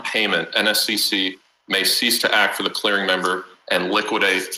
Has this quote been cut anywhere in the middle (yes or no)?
no